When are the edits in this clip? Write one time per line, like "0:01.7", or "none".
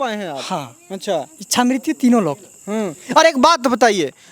none